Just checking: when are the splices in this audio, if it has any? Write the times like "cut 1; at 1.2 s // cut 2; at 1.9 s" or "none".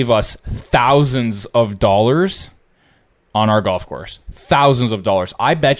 none